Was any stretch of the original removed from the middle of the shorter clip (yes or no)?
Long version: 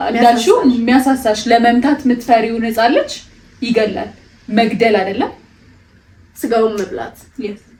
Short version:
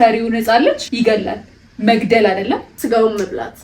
yes